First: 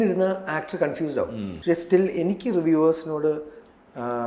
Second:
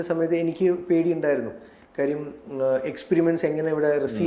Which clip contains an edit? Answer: first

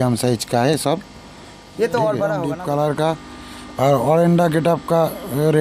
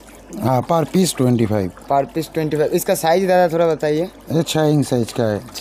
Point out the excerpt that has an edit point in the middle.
first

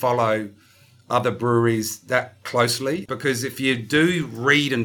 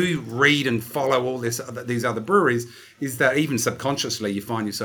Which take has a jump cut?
first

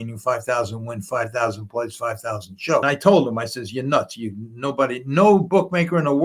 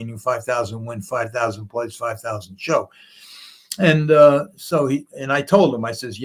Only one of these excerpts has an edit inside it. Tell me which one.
first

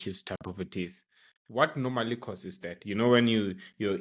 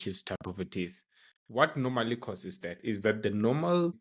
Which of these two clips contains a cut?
second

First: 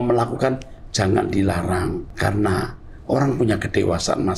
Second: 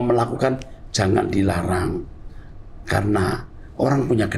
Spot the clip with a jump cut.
first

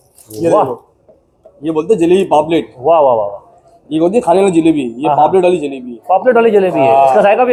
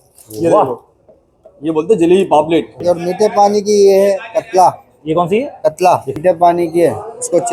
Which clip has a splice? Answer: second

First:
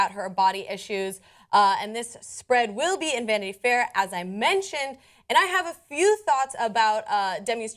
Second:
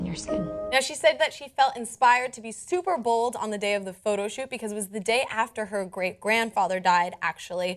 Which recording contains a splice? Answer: second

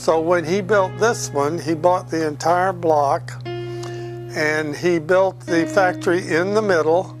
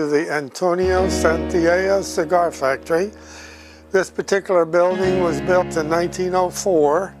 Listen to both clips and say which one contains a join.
first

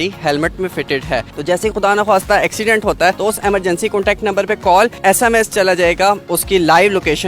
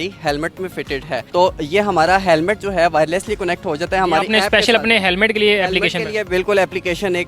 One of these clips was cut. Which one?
first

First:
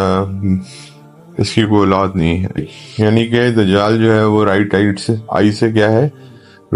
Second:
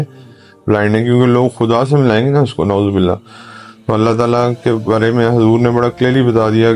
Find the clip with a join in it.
first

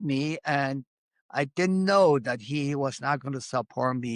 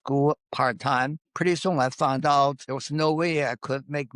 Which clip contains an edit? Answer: second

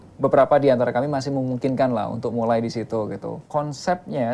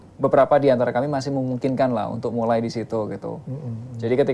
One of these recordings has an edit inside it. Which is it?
first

